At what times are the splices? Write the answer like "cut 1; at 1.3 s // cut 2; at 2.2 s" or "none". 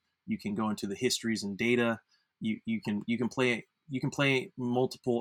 none